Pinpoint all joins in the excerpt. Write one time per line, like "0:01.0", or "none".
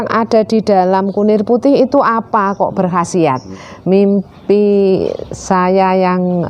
0:03.6

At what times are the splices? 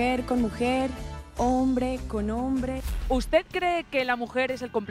0:02.9

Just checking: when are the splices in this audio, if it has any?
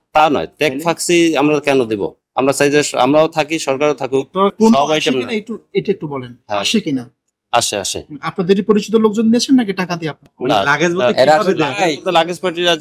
0:04.5

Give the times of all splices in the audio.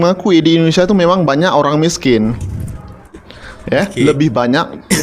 none

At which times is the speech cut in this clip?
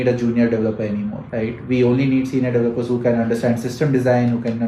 0:01.2

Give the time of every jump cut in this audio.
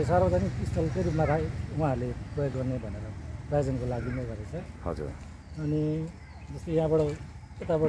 none

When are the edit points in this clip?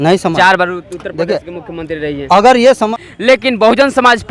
0:02.9

